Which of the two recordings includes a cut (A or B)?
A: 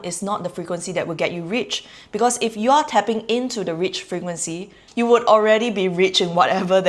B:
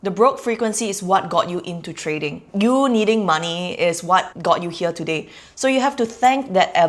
B